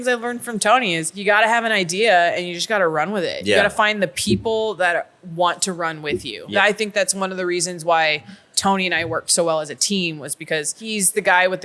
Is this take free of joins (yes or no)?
no